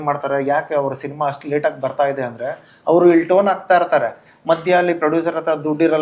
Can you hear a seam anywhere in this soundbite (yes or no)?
no